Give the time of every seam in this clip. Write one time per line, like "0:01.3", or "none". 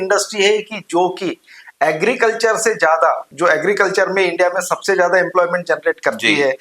0:03.3